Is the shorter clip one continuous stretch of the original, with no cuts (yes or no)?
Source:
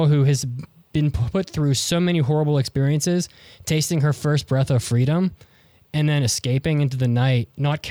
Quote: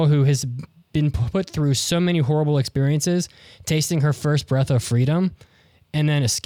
yes